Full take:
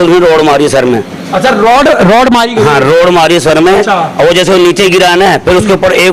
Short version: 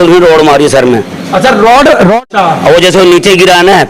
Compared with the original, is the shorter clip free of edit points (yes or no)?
no